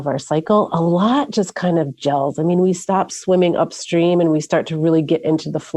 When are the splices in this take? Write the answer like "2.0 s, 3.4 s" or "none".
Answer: none